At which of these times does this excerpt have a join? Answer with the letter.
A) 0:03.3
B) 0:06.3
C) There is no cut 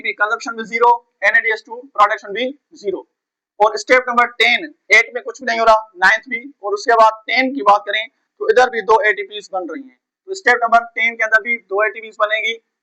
C